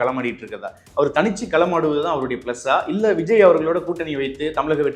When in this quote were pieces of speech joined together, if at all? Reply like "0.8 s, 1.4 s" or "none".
none